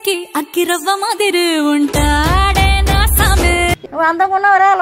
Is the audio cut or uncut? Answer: cut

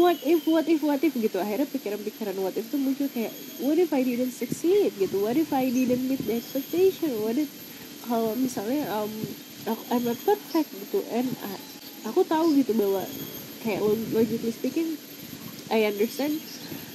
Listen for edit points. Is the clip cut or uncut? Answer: uncut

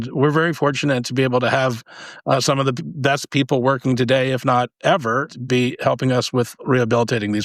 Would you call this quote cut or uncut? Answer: cut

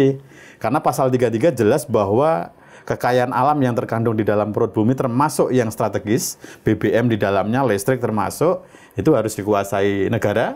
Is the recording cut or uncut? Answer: uncut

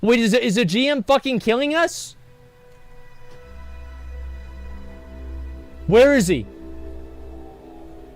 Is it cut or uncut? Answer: uncut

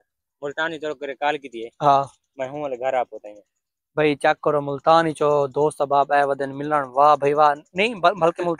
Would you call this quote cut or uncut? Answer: uncut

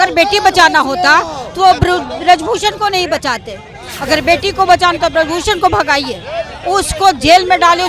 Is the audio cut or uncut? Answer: uncut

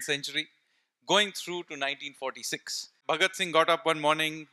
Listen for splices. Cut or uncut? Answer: cut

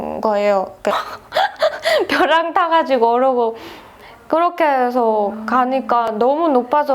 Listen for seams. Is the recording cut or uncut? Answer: cut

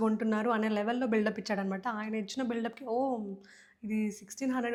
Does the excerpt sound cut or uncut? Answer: uncut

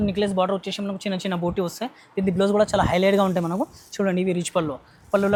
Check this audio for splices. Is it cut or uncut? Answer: uncut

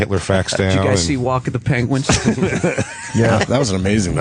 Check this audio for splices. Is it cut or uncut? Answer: cut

